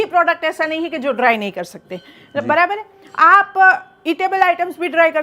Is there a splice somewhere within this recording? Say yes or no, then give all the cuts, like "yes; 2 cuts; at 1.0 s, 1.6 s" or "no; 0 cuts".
no; 0 cuts